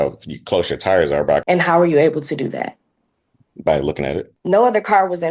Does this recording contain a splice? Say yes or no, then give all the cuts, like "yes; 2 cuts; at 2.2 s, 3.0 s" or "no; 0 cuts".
yes; 2 cuts; at 1.4 s, 4.3 s